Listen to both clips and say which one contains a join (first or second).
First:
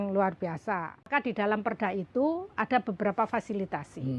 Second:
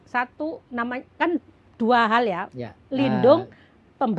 first